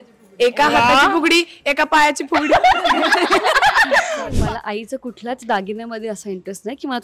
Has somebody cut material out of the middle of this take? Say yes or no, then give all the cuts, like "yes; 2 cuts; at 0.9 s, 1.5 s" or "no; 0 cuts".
yes; 1 cut; at 4.3 s